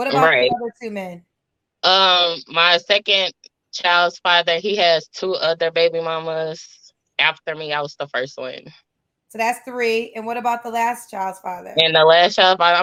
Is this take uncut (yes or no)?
yes